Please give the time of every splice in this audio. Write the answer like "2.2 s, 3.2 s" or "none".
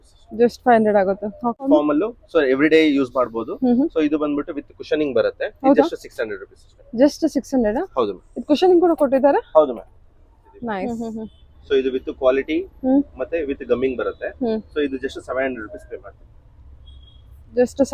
1.7 s, 10.9 s